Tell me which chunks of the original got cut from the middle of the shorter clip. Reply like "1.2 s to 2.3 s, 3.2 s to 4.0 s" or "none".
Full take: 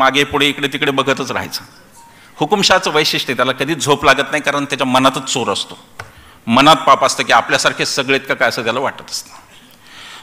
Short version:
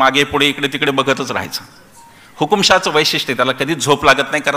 none